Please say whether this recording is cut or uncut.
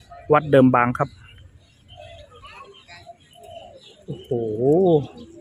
cut